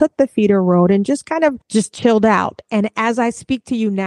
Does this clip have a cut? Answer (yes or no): yes